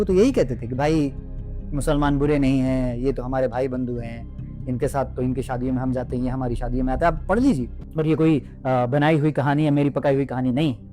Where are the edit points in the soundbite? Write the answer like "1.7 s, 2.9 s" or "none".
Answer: 7.7 s